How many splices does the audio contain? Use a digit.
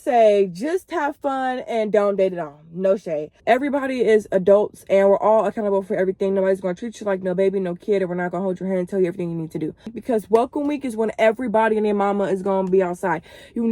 2